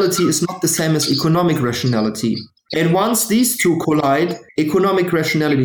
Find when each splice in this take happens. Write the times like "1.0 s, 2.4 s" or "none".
2.6 s, 4.4 s